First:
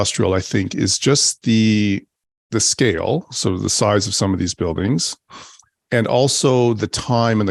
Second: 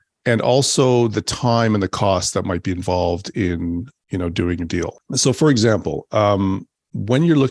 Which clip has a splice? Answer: second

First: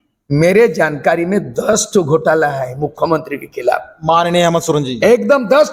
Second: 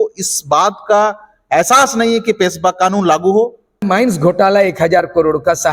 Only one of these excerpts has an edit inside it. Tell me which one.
second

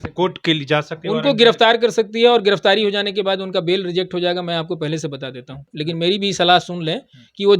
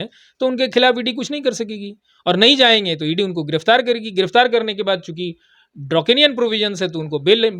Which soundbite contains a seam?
first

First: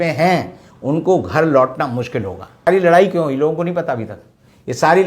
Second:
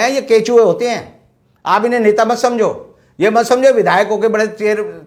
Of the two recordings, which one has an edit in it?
first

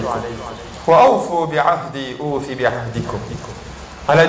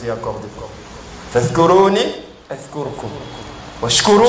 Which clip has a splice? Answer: second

